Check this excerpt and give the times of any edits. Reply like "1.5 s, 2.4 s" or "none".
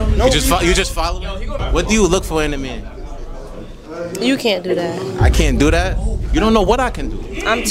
1.6 s